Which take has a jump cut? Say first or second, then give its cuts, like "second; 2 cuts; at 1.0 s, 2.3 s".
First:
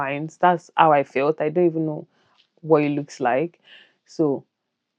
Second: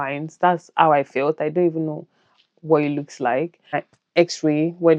second; 1 cut; at 3.9 s